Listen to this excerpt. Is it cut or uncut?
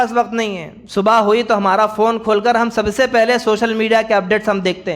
uncut